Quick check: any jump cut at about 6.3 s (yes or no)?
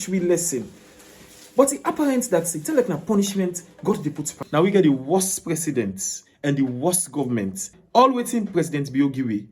no